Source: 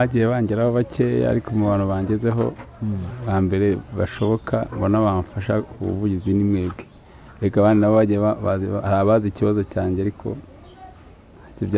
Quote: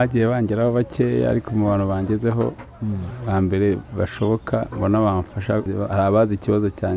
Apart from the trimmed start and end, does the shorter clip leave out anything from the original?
yes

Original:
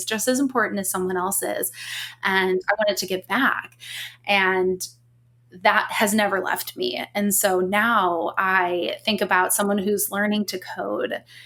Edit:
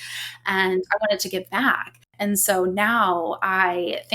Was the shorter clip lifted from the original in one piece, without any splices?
no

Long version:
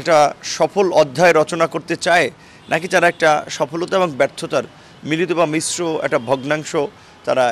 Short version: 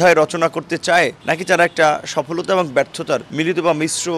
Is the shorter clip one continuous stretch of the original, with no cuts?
no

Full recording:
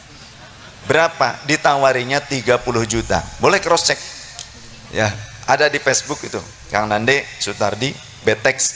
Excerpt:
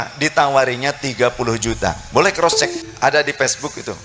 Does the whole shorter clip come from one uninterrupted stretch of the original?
no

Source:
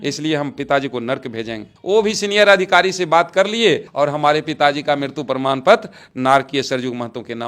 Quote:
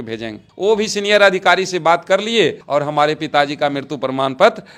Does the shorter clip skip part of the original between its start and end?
no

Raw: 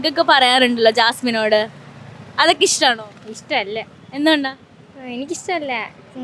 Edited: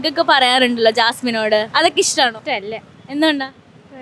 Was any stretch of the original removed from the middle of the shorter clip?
yes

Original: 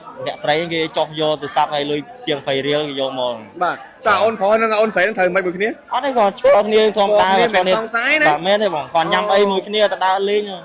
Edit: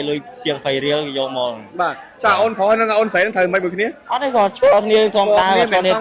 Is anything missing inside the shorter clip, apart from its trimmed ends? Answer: no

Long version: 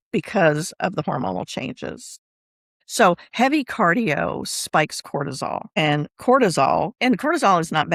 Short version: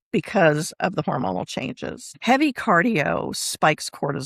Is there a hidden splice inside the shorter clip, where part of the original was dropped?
yes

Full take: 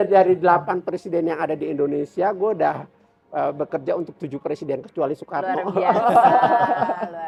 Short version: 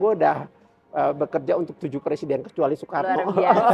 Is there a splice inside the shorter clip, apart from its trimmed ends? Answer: no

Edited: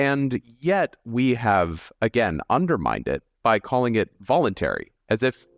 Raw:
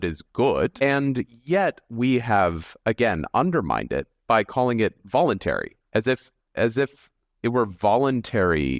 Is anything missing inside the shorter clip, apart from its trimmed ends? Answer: no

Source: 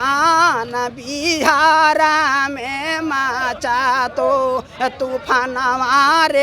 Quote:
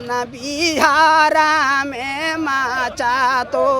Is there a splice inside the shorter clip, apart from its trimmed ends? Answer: no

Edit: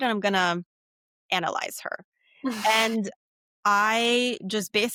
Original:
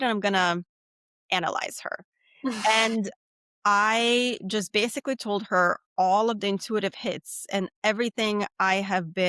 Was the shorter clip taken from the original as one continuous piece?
yes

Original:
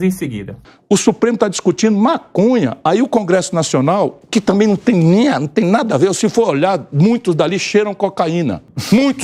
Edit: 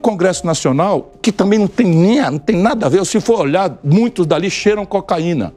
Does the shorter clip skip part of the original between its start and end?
no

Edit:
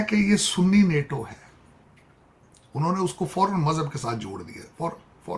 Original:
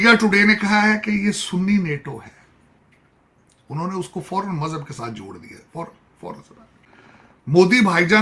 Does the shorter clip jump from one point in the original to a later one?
no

